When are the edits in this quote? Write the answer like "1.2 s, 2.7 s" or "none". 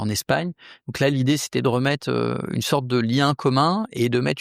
none

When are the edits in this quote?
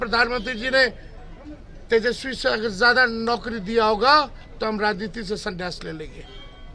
none

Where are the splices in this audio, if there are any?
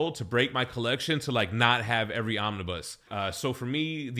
2.9 s

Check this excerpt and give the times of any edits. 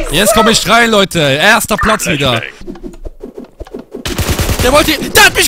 2.6 s

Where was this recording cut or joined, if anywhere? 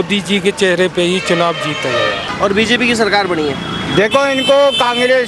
2.2 s

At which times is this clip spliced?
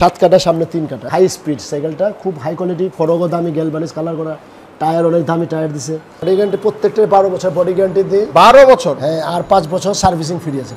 1.0 s, 6.1 s

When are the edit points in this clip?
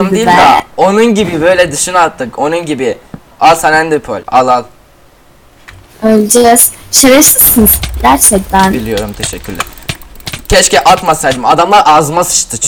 4.2 s

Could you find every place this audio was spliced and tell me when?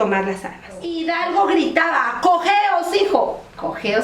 0.9 s

